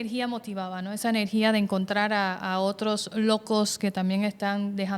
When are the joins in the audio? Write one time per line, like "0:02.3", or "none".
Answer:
none

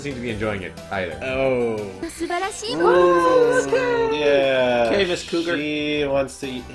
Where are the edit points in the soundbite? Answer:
0:02.0

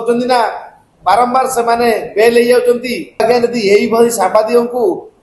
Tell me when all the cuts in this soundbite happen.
0:03.2

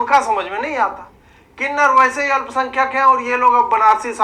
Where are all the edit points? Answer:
none

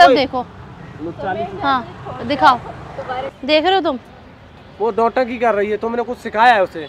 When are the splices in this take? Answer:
0:03.3

